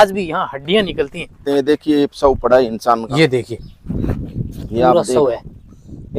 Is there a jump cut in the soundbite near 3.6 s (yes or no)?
no